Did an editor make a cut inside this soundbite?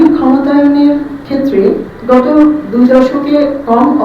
yes; 1 cut; at 1.6 s

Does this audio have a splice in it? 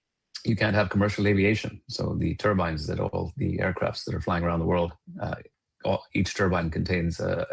no; 0 cuts

